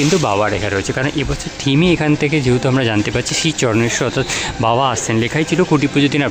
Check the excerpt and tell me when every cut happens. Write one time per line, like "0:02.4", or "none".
none